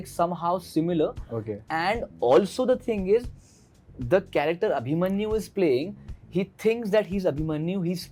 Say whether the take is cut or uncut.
uncut